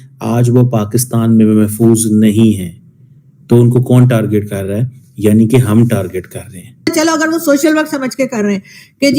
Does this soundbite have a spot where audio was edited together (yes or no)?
yes